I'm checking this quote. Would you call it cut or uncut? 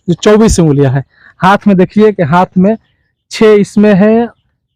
uncut